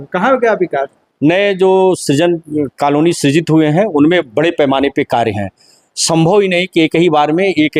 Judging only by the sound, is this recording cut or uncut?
uncut